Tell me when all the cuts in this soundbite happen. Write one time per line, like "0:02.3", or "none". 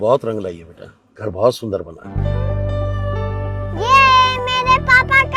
none